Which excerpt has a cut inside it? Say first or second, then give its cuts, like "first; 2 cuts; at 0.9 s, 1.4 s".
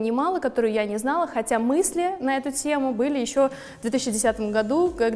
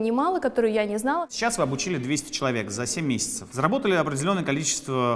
second; 2 cuts; at 1.3 s, 3.4 s